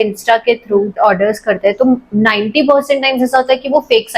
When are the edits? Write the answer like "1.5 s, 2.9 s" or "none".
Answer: 1.0 s